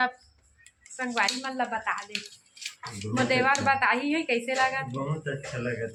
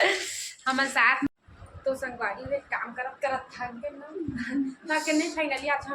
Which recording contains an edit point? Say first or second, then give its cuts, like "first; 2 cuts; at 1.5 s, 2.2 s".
second; 1 cut; at 1.3 s